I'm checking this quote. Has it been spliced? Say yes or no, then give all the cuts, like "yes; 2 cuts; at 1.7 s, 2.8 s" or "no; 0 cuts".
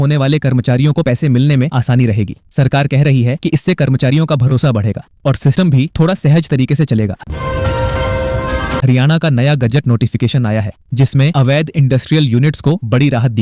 no; 0 cuts